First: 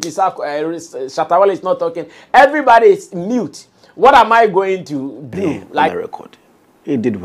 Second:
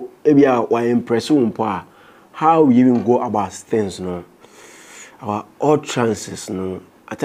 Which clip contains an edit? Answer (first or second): first